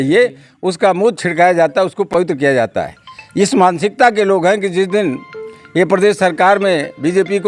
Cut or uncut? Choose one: uncut